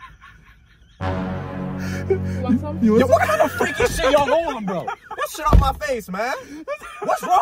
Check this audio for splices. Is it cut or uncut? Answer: uncut